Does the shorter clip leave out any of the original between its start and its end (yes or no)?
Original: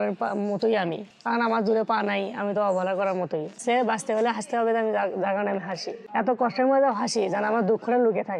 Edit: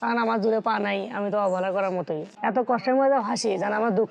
yes